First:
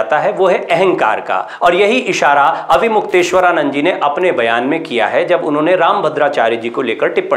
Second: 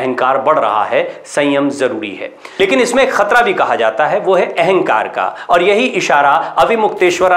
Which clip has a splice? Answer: second; 1 cut; at 2.4 s

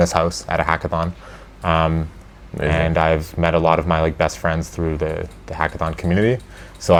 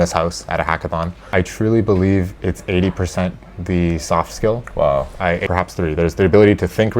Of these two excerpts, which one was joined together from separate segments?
second; 2 cuts; at 1.3 s, 5.4 s

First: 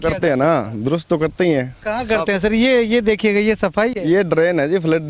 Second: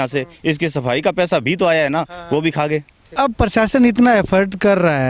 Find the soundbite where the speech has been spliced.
second; 1 cut; at 3.2 s

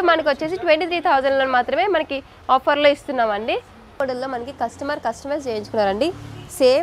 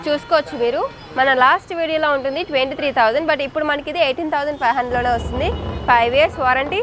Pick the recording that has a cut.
first; 1 cut; at 4.0 s

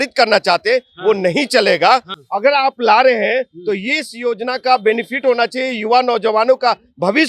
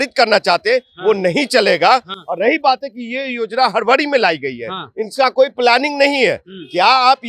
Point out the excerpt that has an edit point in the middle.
first; 1 cut; at 2.2 s

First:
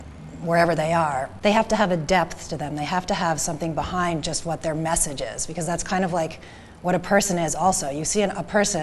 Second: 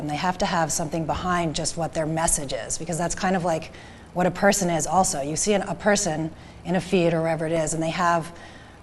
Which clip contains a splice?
first; 1 cut; at 1.3 s

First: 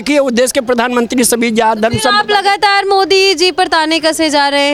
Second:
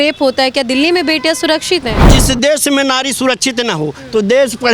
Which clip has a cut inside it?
second; 1 cut; at 2.1 s

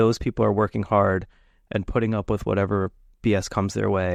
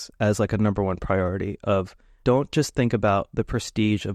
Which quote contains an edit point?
second; 1 cut; at 2.2 s

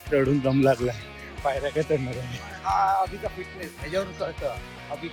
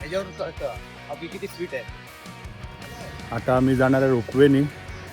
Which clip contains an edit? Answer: second; 1 cut; at 2.5 s

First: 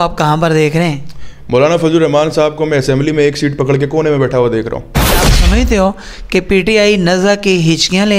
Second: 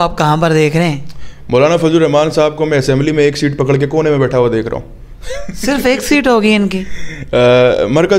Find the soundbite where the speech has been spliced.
first; 1 cut; at 5.3 s

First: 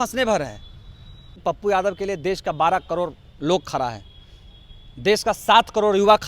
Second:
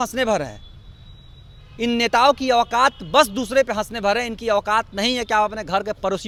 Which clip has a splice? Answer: first; 1 cut; at 1.4 s

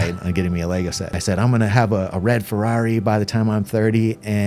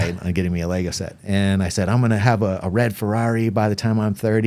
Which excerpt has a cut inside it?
first; 1 cut; at 1.2 s

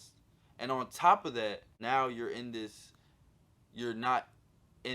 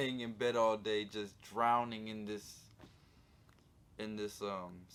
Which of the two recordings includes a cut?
first; 1 cut; at 1.8 s

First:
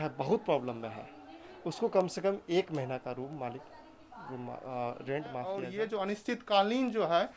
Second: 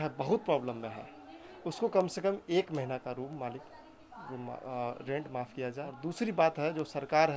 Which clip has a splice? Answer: first; 1 cut; at 5.6 s

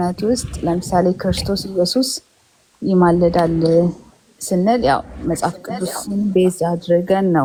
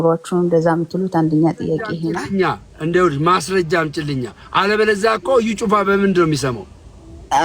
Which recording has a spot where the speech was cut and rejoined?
second; 1 cut; at 2.0 s

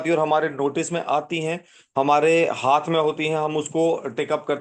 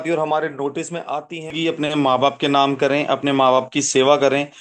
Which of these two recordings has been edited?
second; 1 cut; at 1.5 s

